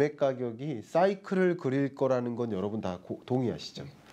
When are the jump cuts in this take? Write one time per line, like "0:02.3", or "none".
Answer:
none